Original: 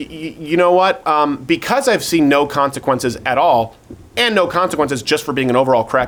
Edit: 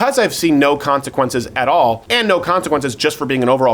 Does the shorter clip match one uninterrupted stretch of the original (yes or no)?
no